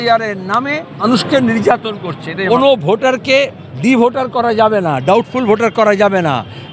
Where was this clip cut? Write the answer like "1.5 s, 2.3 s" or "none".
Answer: 1.0 s, 2.3 s